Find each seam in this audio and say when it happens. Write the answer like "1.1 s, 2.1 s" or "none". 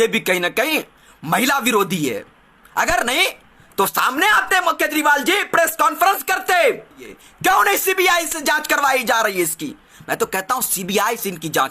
7.1 s

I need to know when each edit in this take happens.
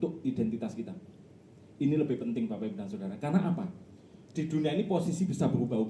none

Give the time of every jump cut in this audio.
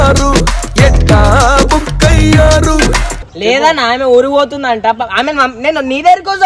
3.2 s

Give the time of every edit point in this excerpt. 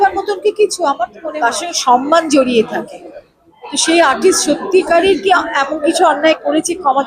1.2 s

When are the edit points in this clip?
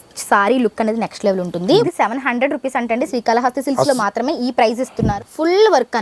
1.8 s, 5.1 s

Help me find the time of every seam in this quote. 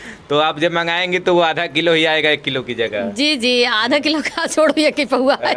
none

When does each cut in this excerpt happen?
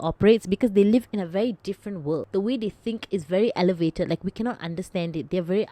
2.3 s

